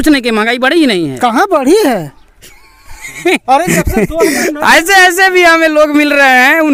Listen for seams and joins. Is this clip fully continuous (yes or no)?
yes